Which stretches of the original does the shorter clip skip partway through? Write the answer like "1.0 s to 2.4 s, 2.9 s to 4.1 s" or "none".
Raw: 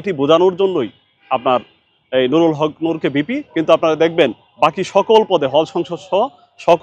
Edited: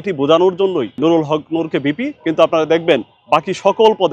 1.0 s to 2.3 s